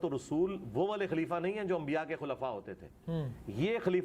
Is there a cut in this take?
no; 0 cuts

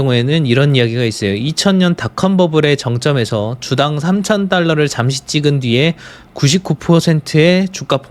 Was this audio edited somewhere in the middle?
no; 0 cuts

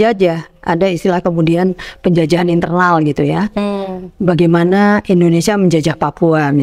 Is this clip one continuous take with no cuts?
yes; 0 cuts

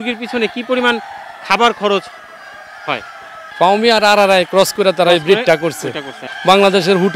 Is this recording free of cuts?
no; 2 cuts; at 3.4 s, 6.2 s

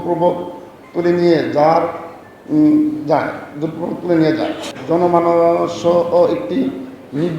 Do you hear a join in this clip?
yes; 1 cut; at 4.7 s

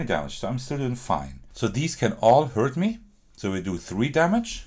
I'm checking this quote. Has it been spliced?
yes; 1 cut; at 1.4 s

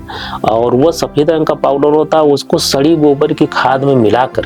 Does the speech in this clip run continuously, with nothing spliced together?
yes; 0 cuts

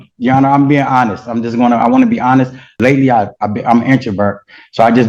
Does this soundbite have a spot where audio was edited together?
yes; 1 cut; at 2.7 s

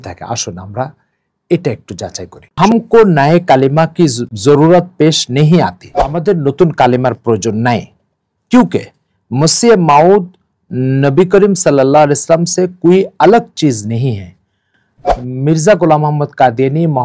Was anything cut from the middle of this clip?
yes; 3 cuts; at 2.6 s, 4.3 s, 6.2 s

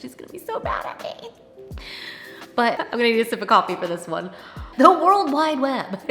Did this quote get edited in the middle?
yes; 2 cuts; at 2.8 s, 4.6 s

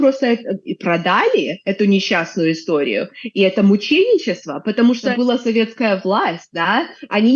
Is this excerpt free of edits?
no; 1 cut; at 5.1 s

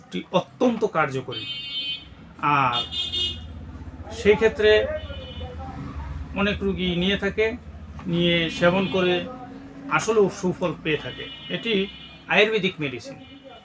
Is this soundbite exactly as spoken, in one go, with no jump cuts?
yes; 0 cuts

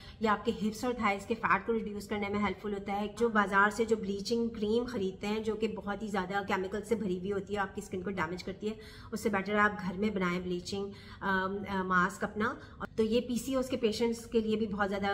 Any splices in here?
yes; 2 cuts; at 3.1 s, 12.8 s

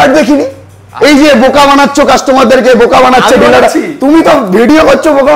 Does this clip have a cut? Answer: no; 0 cuts

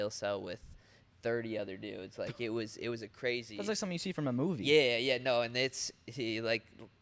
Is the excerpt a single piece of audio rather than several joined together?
yes; 0 cuts

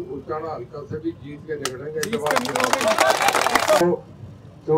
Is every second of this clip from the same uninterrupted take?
no; 1 cut; at 3.8 s

